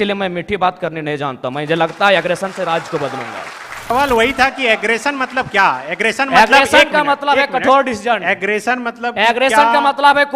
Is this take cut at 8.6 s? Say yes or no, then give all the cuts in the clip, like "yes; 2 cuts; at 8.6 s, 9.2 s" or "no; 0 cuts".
no; 1 cut; at 3.9 s